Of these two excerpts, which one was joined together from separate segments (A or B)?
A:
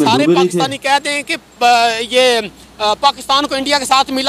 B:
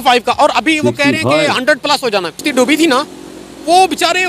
B